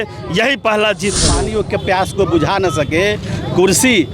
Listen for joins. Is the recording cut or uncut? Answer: cut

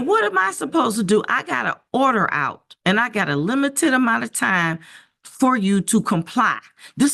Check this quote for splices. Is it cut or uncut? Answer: uncut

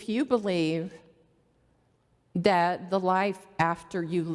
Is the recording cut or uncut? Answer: uncut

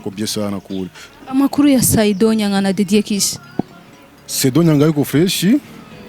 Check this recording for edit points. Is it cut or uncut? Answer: cut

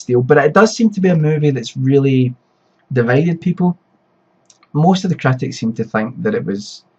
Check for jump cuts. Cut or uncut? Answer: uncut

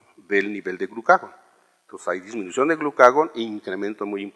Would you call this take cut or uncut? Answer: cut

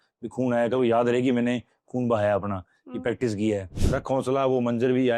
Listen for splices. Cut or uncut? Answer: cut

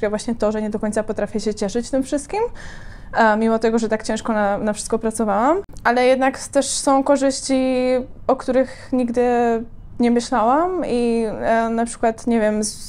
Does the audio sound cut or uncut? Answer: uncut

